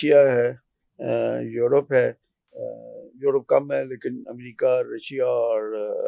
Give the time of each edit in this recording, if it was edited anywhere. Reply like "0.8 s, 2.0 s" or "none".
none